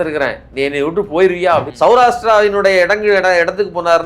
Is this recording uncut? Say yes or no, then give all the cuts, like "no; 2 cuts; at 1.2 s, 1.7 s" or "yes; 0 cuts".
no; 1 cut; at 1.7 s